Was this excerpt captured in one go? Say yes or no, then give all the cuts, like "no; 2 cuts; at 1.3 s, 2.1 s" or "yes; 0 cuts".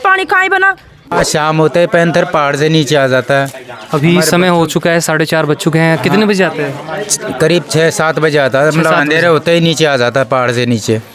yes; 0 cuts